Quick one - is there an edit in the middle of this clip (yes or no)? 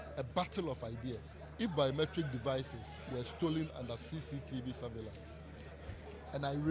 yes